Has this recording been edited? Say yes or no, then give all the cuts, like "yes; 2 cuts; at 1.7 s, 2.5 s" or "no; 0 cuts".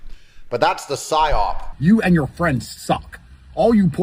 yes; 1 cut; at 1.6 s